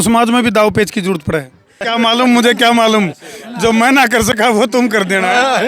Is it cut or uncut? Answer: cut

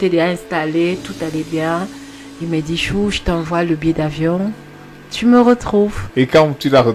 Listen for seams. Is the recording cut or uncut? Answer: cut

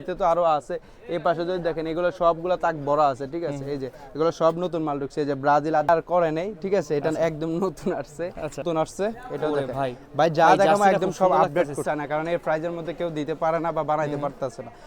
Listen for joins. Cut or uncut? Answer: cut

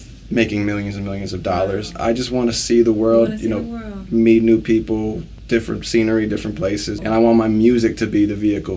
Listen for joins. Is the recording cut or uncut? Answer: cut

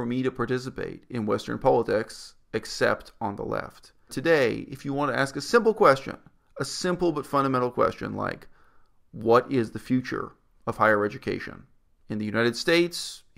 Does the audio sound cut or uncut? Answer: cut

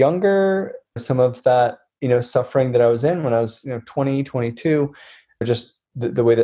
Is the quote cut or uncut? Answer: cut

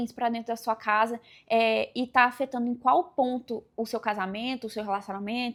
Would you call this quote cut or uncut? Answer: uncut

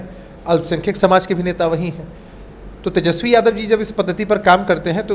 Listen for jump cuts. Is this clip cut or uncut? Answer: uncut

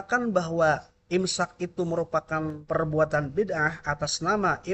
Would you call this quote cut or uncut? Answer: cut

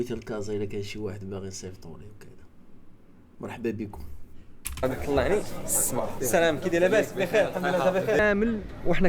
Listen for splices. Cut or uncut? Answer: cut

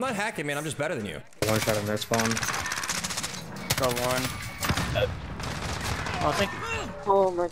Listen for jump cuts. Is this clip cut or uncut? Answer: cut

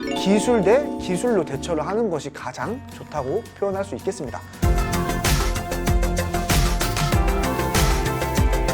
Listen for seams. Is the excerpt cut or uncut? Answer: cut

